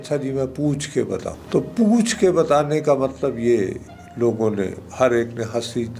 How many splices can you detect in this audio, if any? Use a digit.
1